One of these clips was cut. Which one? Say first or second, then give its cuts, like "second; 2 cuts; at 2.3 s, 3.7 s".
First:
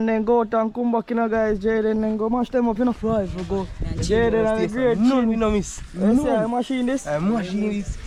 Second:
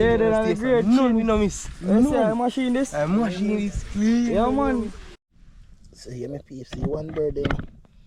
second; 1 cut; at 5.0 s